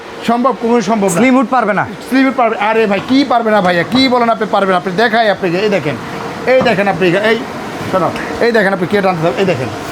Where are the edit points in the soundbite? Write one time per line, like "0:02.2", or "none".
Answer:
none